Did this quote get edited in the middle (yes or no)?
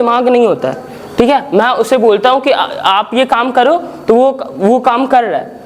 no